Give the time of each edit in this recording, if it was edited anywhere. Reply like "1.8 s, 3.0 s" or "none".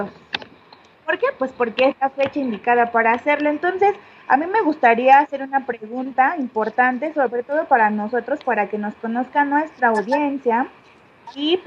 2.6 s

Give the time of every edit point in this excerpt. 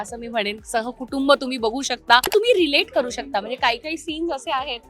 2.3 s

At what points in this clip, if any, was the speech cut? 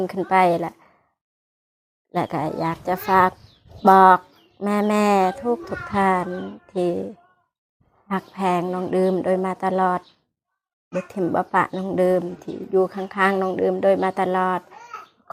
none

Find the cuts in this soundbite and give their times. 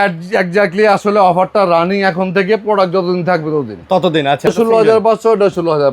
4.5 s

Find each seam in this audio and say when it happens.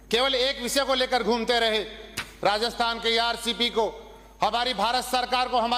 none

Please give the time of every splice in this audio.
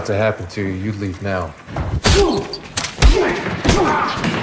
none

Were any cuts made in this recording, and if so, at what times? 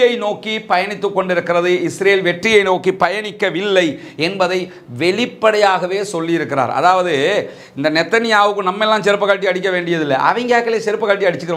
none

